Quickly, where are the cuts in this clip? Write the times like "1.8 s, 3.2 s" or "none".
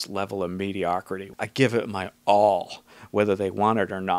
1.2 s

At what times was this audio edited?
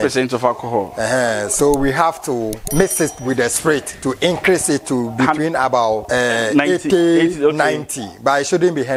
0.9 s, 2.6 s, 6.0 s

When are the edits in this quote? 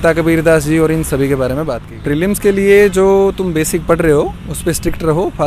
1.9 s

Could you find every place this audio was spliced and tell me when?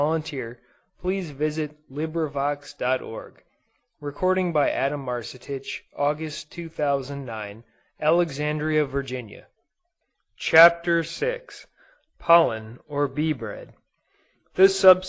2.1 s

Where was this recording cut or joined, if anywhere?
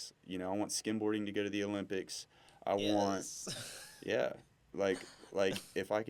none

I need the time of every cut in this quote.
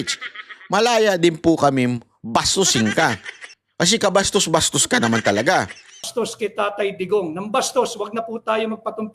6.1 s

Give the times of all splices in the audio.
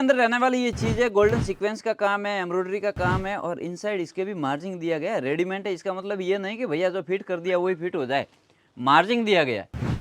none

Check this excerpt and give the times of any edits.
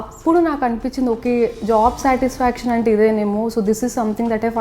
none

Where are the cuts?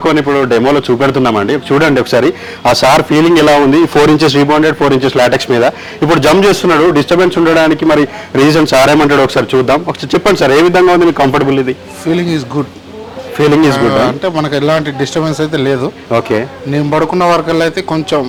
none

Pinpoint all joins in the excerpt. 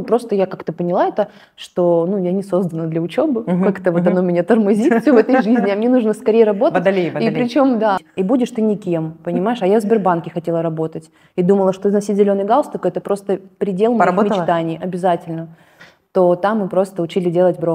8.0 s, 15.8 s

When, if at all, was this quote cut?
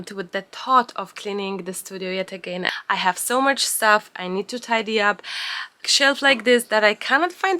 2.7 s, 5.8 s

